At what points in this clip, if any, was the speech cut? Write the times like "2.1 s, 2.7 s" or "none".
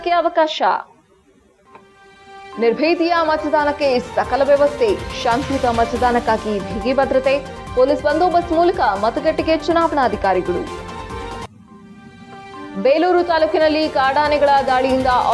none